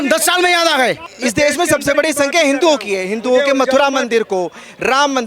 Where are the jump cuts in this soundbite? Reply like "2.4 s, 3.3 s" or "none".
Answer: 1.1 s